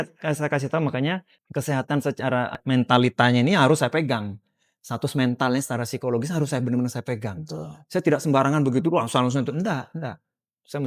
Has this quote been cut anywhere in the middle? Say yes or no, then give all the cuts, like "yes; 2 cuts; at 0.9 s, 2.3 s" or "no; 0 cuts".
yes; 2 cuts; at 1.4 s, 2.6 s